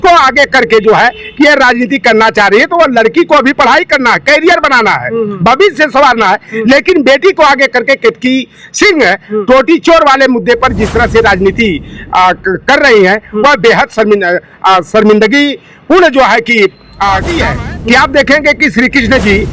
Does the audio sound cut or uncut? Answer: cut